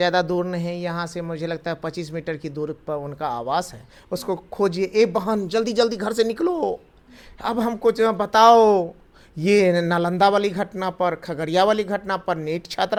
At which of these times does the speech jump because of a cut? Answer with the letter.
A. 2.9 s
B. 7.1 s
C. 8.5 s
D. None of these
D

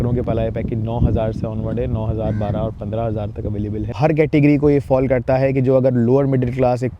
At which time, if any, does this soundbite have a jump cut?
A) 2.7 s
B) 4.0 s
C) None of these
B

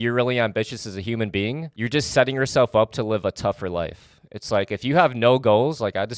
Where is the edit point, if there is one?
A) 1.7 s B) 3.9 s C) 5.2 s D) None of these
A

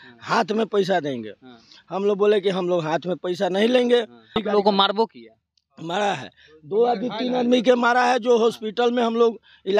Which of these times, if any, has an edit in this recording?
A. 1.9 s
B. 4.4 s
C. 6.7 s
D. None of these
B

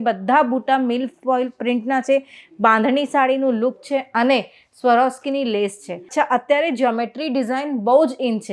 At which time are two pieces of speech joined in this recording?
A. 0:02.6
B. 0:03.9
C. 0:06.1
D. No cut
C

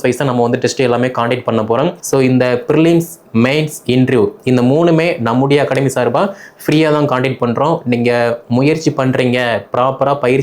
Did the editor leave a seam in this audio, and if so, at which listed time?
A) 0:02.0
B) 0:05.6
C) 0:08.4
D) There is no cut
A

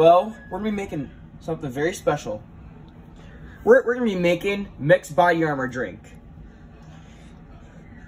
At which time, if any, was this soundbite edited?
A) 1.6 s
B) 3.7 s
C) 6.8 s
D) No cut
D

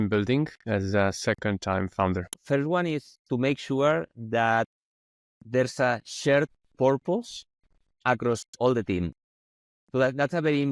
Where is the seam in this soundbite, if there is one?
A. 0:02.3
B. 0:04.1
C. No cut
A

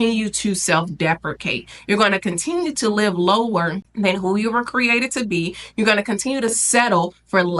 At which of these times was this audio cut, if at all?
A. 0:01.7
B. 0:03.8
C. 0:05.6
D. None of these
B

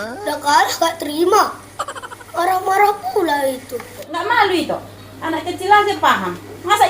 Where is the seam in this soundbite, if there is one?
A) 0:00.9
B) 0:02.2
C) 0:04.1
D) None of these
C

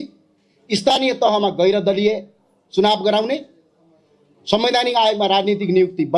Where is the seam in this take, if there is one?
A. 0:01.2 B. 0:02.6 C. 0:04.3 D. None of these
D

